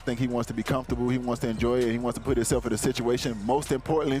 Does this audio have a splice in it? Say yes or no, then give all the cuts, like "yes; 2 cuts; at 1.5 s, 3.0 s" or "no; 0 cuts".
no; 0 cuts